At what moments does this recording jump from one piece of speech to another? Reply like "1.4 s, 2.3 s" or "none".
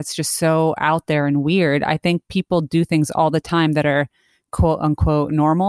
none